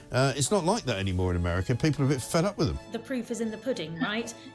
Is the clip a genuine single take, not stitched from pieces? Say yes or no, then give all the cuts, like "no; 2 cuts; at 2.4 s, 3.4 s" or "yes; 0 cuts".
no; 1 cut; at 2.9 s